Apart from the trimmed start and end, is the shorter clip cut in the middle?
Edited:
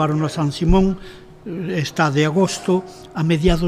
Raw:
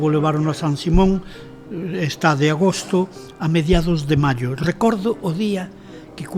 no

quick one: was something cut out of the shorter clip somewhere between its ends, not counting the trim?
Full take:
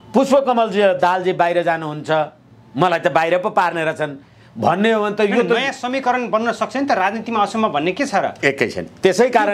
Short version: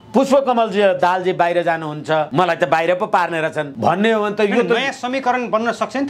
yes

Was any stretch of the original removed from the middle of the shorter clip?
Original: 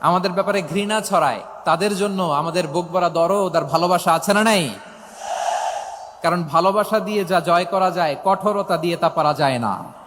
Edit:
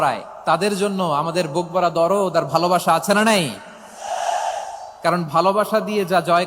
no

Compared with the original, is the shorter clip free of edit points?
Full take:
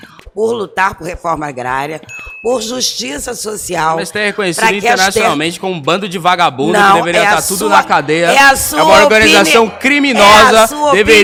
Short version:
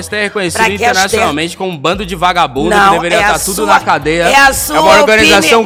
yes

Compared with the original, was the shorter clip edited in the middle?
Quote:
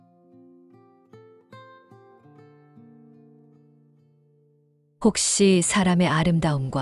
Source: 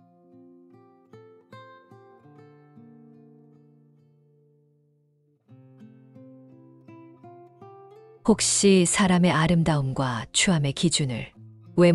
yes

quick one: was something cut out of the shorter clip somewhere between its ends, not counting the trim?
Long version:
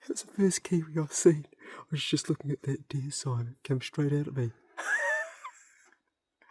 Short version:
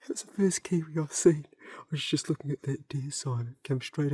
no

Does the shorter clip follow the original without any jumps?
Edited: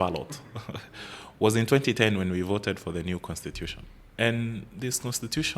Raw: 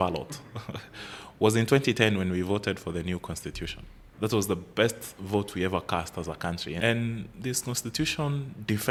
no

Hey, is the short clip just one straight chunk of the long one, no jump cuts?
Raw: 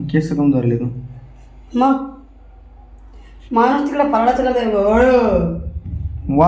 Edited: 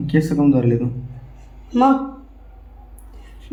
yes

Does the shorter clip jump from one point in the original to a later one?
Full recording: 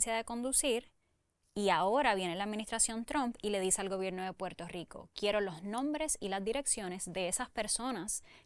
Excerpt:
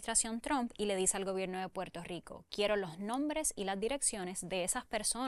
no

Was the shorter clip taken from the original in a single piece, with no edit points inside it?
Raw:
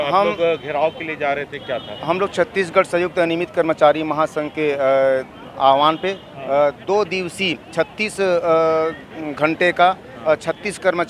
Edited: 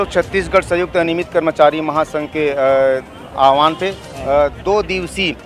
yes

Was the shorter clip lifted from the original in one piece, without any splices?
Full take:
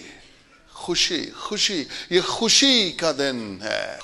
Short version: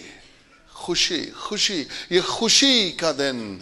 yes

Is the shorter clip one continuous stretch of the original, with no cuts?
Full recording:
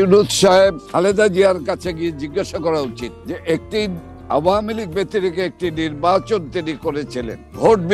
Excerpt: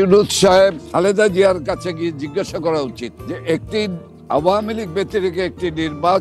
yes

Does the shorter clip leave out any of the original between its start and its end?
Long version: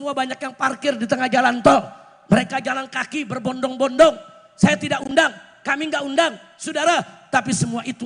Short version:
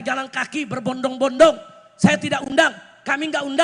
no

